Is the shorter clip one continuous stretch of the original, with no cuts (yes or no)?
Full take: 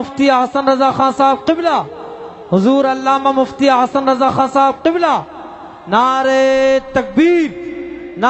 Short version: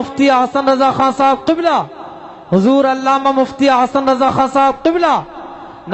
yes